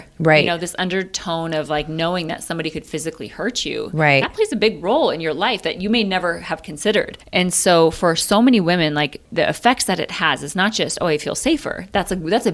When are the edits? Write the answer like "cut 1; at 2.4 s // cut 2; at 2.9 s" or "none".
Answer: cut 1; at 7.2 s // cut 2; at 9.2 s